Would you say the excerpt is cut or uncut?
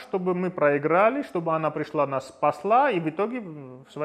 uncut